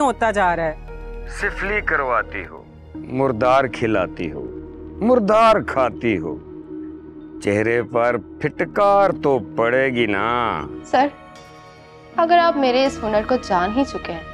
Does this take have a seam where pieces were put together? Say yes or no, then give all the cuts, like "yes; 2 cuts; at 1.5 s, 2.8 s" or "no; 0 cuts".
yes; 1 cut; at 10.7 s